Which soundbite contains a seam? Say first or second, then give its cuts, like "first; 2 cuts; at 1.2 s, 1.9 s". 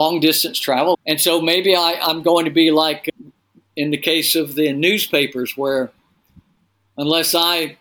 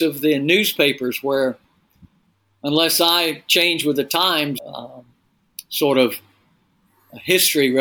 first; 1 cut; at 0.9 s